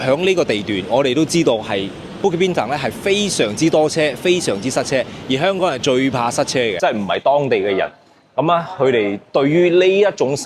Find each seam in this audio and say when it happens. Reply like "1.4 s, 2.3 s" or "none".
6.8 s